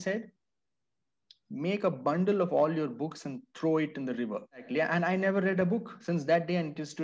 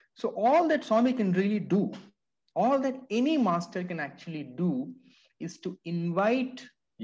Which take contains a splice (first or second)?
first